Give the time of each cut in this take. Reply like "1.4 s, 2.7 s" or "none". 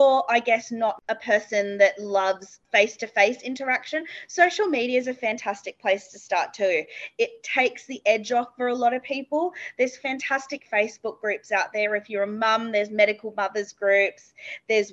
1.0 s